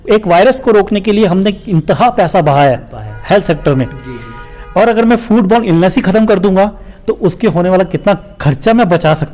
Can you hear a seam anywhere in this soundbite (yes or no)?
no